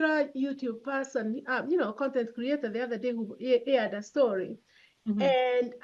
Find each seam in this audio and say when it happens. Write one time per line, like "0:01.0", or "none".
none